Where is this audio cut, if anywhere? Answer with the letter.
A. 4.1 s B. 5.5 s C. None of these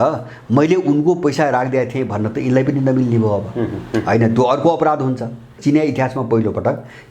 B